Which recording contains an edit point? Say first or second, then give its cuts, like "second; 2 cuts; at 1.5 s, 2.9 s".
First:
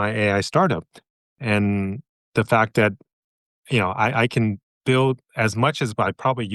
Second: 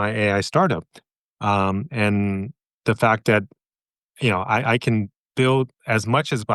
first; 1 cut; at 1.3 s